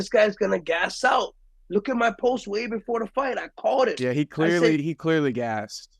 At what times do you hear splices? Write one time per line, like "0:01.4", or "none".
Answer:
none